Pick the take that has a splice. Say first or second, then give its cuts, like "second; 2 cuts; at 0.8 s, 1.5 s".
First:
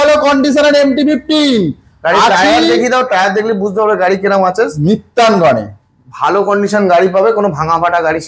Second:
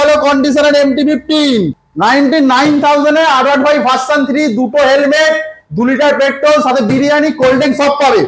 second; 1 cut; at 1.8 s